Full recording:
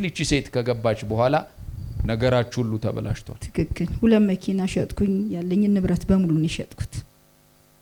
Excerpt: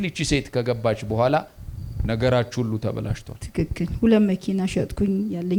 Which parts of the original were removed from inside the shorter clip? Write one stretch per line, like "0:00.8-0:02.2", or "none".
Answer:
none

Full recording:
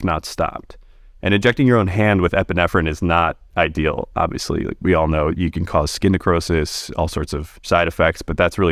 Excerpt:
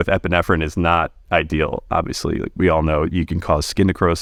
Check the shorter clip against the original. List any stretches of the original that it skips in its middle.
none

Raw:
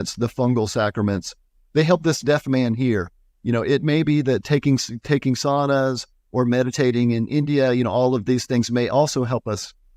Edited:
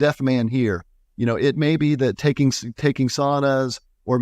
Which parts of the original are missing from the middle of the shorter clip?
none

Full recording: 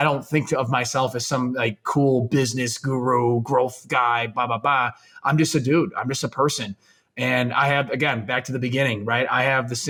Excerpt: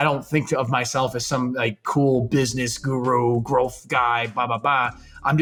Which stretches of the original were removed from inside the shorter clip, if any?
none

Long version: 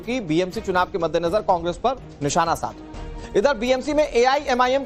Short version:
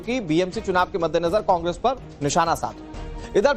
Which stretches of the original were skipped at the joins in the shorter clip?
none

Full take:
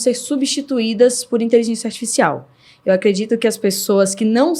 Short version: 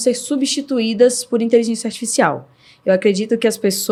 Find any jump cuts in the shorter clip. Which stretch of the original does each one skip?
none

